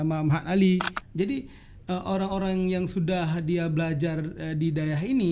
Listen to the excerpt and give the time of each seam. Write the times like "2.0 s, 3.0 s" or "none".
1.0 s